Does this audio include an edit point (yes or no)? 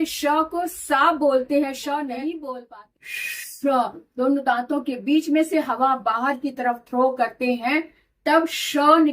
yes